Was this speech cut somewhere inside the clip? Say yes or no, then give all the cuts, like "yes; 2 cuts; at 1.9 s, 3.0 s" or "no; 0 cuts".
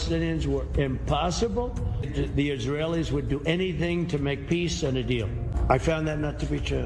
yes; 2 cuts; at 2.1 s, 5.5 s